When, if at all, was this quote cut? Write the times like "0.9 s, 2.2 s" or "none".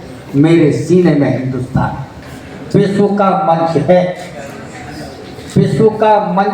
2.0 s